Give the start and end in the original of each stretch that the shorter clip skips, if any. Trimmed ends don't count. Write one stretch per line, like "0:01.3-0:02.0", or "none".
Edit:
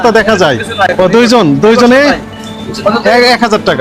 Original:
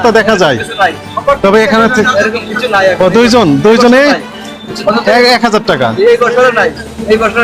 0:00.9-0:02.9